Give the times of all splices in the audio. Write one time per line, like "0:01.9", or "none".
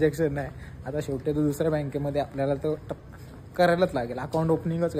none

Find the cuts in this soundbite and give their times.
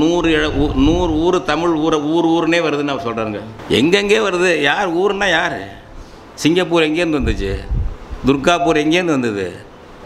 0:03.5

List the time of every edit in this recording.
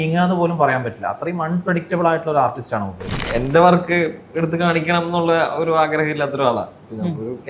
0:03.2

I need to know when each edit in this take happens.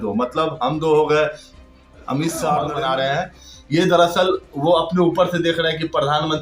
0:02.7

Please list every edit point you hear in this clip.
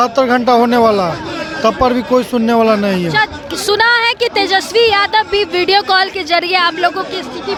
none

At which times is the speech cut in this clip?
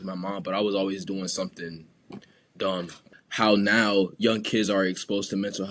0:02.9

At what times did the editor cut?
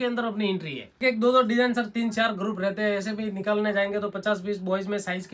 0:01.0

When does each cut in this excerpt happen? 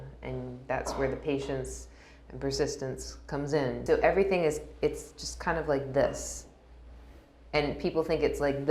0:03.8

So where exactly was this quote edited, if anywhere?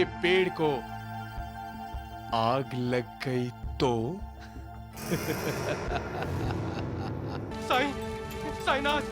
0:07.5

